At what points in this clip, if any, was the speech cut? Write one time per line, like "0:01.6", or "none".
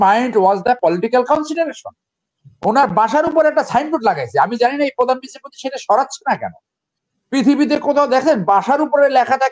none